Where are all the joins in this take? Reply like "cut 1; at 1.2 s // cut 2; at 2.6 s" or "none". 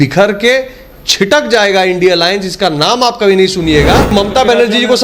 cut 1; at 4.1 s